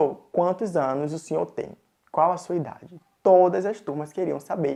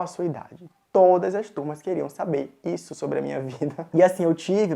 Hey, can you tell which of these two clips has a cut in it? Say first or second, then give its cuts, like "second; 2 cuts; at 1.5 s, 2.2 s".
second; 1 cut; at 3.9 s